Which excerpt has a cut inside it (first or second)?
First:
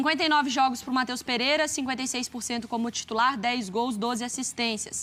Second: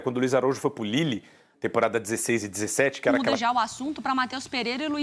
second